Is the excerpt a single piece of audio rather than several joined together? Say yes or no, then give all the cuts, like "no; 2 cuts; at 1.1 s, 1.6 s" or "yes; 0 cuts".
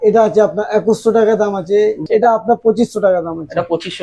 no; 1 cut; at 2.0 s